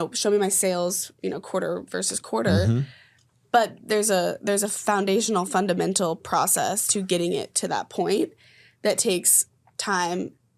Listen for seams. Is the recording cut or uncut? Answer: uncut